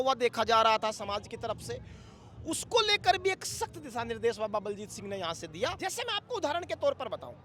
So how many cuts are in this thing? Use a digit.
1